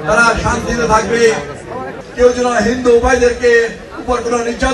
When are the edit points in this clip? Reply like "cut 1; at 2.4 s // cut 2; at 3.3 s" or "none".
cut 1; at 2.0 s